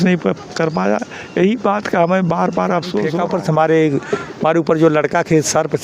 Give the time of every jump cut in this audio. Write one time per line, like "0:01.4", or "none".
0:03.2